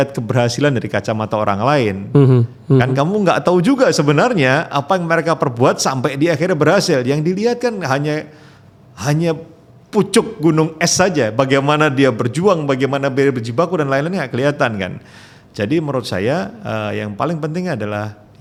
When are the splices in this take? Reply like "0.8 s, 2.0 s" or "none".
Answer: none

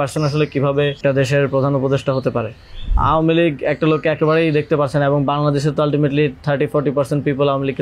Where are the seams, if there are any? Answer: 1.0 s, 2.9 s

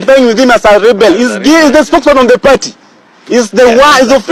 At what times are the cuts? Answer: none

